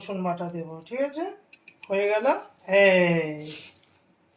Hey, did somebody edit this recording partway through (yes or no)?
no